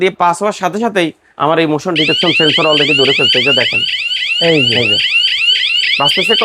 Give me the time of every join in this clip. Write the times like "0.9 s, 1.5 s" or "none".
none